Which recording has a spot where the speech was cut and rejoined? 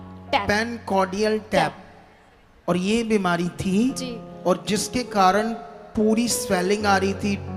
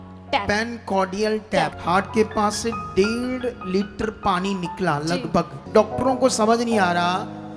second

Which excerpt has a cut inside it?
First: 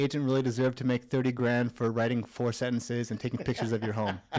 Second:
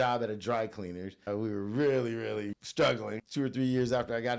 second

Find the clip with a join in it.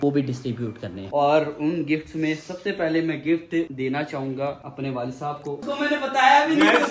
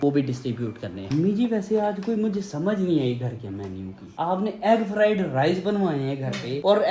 first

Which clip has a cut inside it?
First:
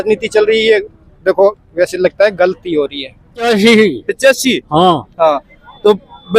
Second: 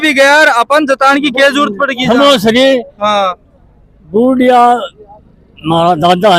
first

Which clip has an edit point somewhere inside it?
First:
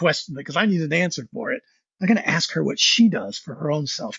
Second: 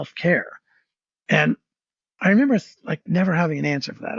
second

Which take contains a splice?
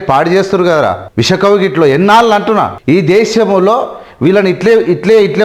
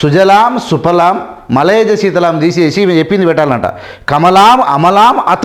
first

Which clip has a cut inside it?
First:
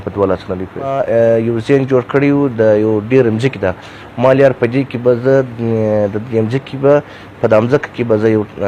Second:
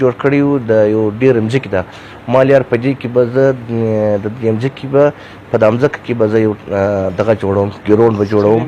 first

